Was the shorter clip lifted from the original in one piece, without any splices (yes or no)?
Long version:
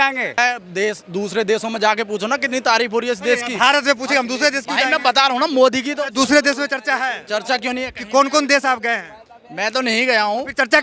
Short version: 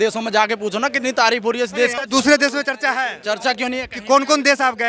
no